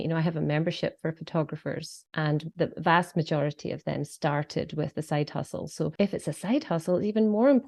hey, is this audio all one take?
no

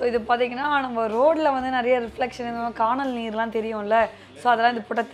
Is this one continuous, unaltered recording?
yes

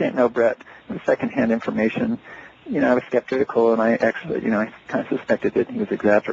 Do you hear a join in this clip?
yes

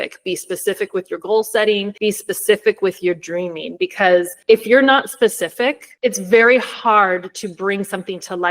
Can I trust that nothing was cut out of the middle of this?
no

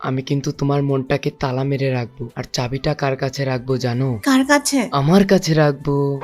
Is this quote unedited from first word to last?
yes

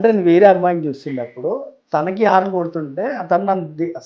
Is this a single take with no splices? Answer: yes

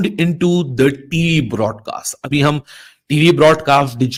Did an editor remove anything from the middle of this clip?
no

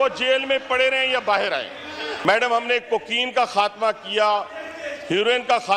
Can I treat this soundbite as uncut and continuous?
no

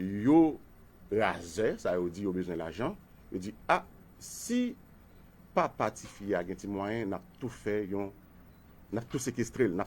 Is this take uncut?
no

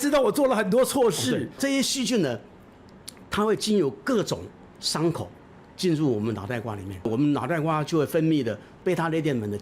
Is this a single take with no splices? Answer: no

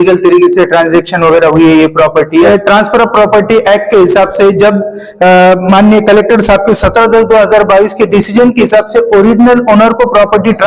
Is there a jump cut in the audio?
yes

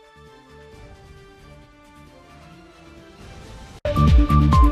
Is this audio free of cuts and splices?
yes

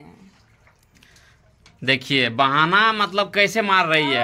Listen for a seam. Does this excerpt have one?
no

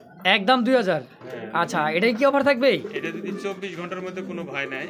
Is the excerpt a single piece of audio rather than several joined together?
yes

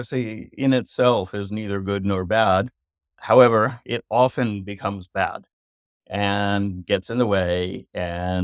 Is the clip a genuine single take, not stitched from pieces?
yes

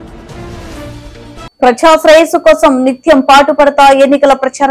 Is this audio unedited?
no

